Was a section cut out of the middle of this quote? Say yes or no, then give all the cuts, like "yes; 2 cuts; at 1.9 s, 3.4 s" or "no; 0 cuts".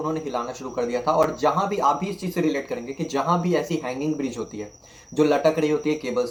no; 0 cuts